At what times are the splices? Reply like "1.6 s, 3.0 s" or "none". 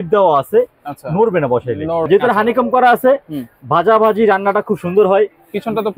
2.1 s